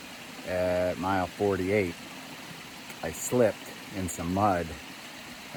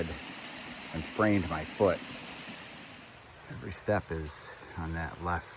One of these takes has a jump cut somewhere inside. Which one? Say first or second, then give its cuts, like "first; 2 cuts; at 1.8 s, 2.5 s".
second; 1 cut; at 2.9 s